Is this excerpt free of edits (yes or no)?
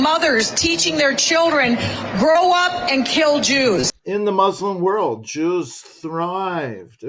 no